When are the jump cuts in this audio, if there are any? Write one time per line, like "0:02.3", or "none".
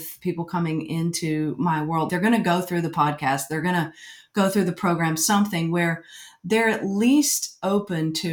0:02.1